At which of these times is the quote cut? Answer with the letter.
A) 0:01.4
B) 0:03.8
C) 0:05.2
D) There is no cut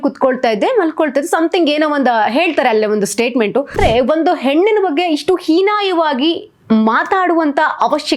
B